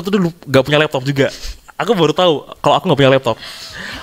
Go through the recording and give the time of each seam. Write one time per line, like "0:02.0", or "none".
none